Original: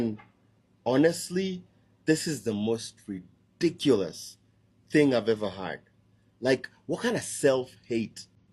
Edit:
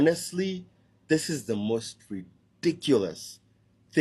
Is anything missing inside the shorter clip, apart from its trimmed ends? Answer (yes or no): no